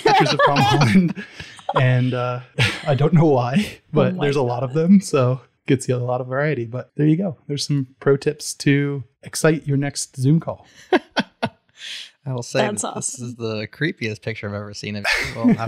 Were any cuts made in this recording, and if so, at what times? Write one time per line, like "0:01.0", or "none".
0:02.5
0:05.5
0:06.8